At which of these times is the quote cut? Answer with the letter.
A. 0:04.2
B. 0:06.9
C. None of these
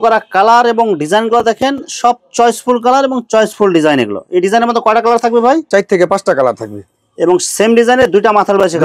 C